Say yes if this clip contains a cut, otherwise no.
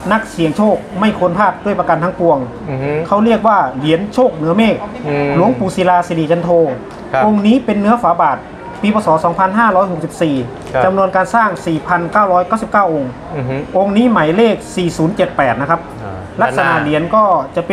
no